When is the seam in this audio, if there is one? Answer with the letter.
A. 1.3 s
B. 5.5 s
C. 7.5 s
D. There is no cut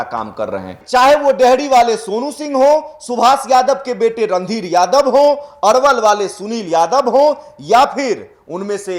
D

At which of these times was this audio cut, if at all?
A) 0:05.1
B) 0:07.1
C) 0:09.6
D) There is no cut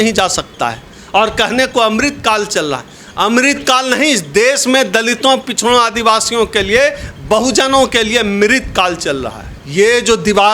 D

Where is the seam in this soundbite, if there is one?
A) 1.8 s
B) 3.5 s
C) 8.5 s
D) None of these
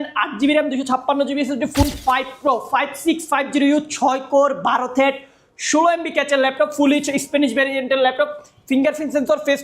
A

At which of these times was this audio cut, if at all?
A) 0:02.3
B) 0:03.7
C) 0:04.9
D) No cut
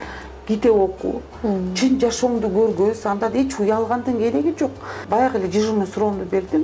C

